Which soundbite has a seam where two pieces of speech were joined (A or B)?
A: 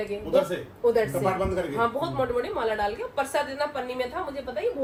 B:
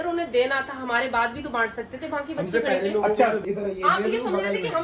B